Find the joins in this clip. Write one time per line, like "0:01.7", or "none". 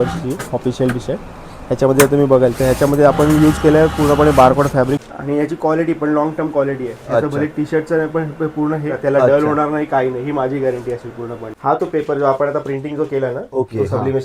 0:05.0
0:08.9
0:11.5

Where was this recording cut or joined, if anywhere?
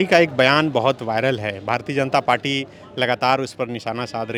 none

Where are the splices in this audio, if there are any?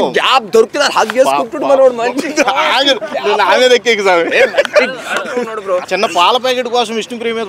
0:05.9

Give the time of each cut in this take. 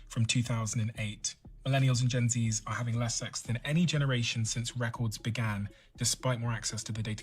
0:05.8

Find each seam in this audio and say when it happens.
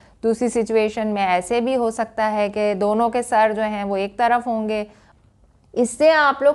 0:05.0

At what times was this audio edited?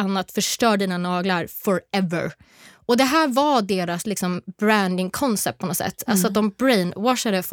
none

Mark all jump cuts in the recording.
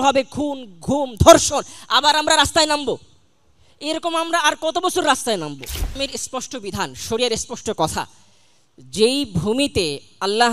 0:06.0

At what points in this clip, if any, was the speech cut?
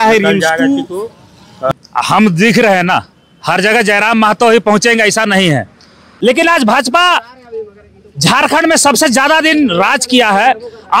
0:01.7
0:06.1

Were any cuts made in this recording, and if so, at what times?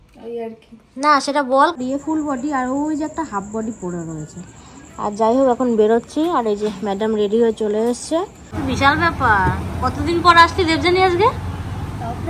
0:01.8
0:08.5

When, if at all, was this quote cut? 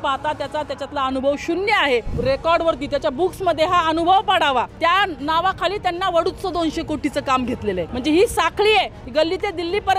0:02.2
0:04.7
0:07.9
0:09.0

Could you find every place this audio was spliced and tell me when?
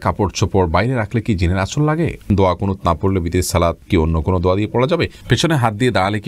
0:02.3
0:03.8
0:05.2

